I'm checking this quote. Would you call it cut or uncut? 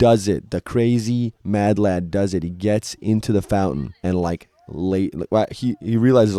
uncut